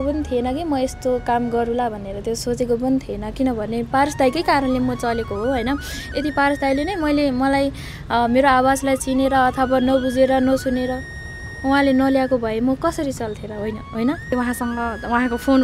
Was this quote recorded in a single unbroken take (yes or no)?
no